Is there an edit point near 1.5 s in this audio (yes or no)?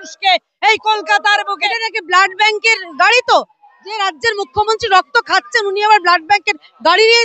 yes